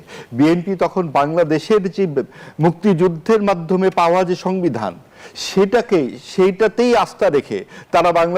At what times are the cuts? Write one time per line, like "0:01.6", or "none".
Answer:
none